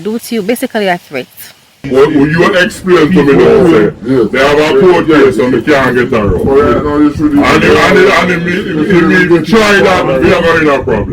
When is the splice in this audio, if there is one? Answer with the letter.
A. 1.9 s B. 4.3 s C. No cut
A